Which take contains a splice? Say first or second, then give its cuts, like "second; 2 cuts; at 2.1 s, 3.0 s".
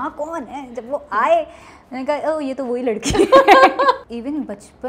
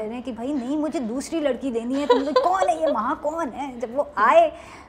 first; 1 cut; at 4.0 s